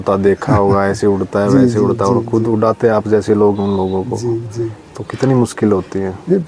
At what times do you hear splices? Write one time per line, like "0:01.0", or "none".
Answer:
none